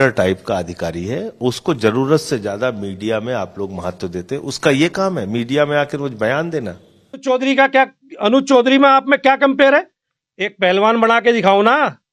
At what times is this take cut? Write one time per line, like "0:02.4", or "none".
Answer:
0:07.2